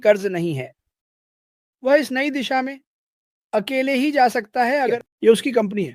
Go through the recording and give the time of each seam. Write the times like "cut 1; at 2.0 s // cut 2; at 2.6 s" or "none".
cut 1; at 4.8 s

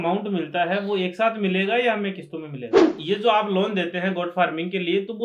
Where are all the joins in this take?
cut 1; at 2.9 s

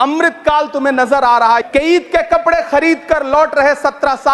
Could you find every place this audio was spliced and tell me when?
cut 1; at 1.6 s

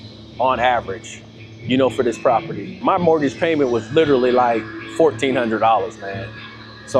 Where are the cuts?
cut 1; at 2.8 s

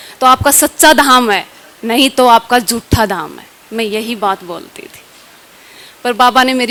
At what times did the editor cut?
none

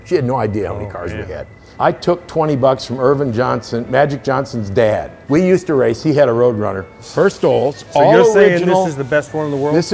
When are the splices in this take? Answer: cut 1; at 1.6 s // cut 2; at 5.1 s // cut 3; at 7.0 s

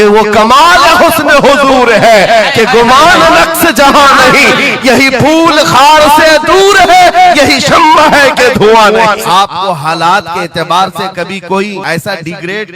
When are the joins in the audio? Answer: cut 1; at 9.2 s // cut 2; at 11.8 s

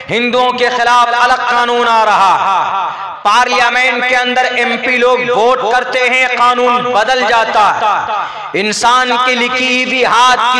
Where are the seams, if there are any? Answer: none

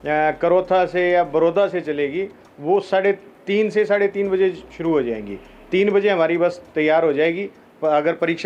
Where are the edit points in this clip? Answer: none

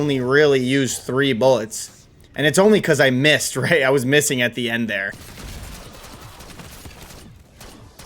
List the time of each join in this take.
cut 1; at 5.0 s

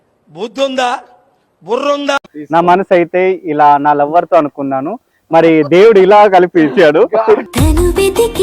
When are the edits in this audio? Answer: cut 1; at 2.2 s

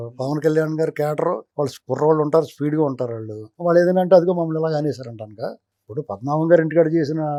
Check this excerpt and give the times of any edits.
none

